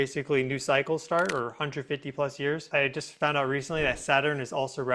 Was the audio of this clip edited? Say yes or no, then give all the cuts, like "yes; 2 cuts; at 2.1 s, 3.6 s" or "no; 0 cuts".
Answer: yes; 1 cut; at 2.6 s